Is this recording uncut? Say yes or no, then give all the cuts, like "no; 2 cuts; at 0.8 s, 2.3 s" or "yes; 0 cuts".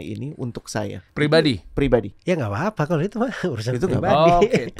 no; 2 cuts; at 1.0 s, 2.1 s